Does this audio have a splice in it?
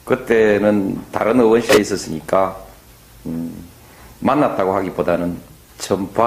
yes; 1 cut; at 3.1 s

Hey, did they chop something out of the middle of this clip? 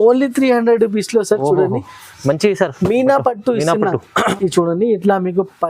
yes; 1 cut; at 4.3 s

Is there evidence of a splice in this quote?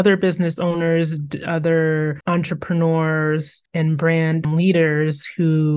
yes; 1 cut; at 4.5 s

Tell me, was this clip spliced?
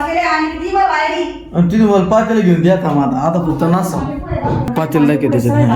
yes; 1 cut; at 4.7 s

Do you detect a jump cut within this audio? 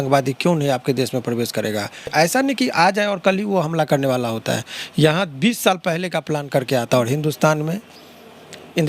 yes; 1 cut; at 2.1 s

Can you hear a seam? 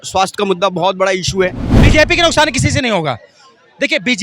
yes; 1 cut; at 1.7 s

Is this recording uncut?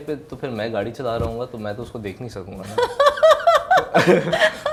yes; 0 cuts

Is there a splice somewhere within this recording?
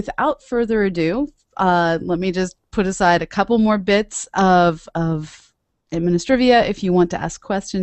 no; 0 cuts

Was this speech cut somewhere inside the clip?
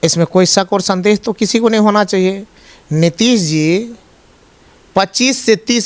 no; 0 cuts

